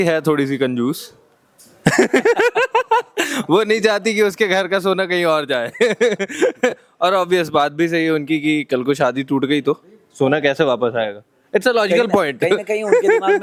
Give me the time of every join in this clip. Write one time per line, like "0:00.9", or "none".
none